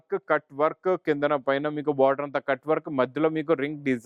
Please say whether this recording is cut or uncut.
uncut